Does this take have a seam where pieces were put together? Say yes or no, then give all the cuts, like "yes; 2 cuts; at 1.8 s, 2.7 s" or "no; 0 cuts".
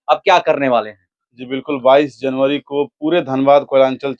no; 0 cuts